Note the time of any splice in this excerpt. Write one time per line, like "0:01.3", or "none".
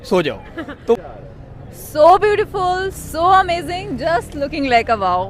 0:01.0